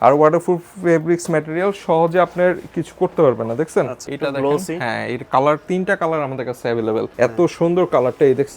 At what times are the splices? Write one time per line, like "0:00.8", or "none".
0:04.1
0:07.1